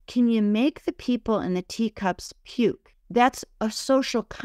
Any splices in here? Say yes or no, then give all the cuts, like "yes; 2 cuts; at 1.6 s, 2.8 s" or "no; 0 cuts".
yes; 1 cut; at 2.9 s